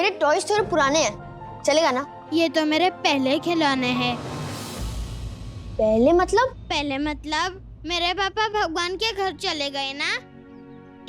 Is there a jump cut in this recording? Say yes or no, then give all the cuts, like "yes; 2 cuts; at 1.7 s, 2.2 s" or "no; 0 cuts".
yes; 1 cut; at 2.1 s